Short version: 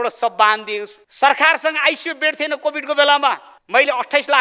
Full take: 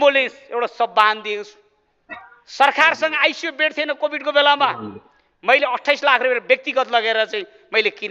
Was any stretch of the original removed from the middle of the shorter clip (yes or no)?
yes